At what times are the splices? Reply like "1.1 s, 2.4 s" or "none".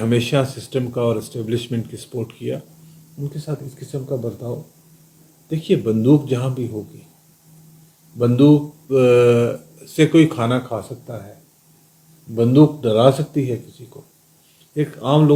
none